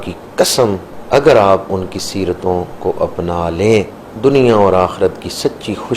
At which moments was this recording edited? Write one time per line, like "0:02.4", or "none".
0:00.9
0:04.0